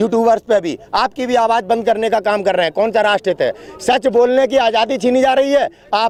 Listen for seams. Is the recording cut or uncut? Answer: uncut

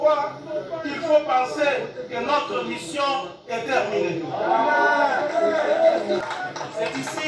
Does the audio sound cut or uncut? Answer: cut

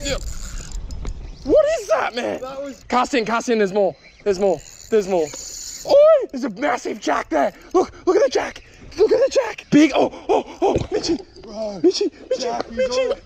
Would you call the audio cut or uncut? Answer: cut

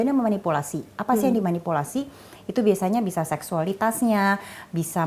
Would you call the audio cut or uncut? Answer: uncut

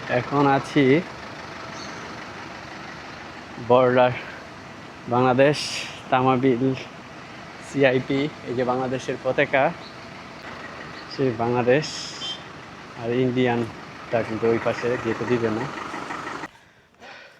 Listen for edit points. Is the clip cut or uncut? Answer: cut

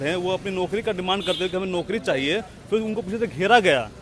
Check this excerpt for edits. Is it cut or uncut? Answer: uncut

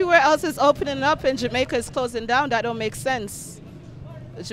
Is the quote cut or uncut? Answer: uncut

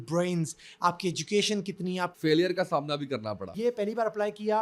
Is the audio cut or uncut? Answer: cut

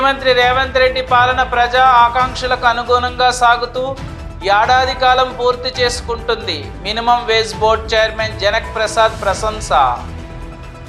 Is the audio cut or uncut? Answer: uncut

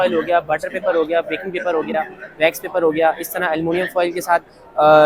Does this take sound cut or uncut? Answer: uncut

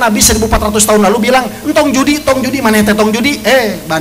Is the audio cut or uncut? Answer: uncut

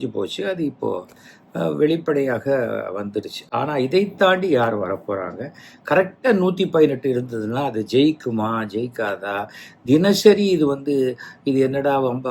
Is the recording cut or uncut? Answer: uncut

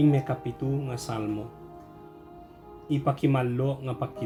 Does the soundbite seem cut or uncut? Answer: uncut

